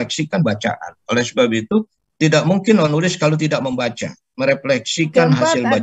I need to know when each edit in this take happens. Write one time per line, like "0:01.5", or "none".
none